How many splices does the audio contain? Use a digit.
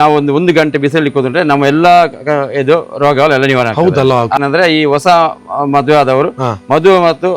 1